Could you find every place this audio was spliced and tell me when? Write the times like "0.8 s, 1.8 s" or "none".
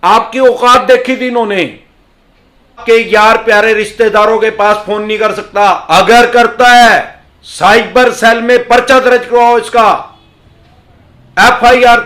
2.8 s